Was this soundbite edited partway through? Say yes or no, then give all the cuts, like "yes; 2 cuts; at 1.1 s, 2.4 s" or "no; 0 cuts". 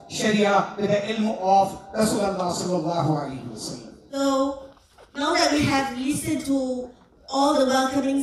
yes; 1 cut; at 4.2 s